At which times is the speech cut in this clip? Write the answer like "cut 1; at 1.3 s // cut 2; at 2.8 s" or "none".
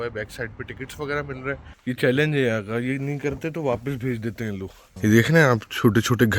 cut 1; at 1.7 s // cut 2; at 4.9 s